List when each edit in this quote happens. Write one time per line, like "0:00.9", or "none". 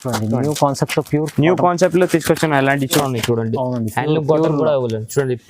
0:03.1